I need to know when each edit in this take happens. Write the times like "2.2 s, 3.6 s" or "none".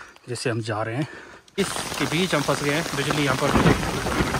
1.6 s